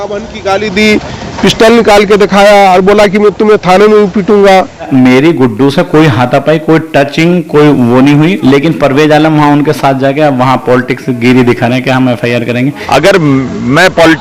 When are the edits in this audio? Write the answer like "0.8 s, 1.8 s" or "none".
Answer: 4.9 s, 8.3 s, 12.8 s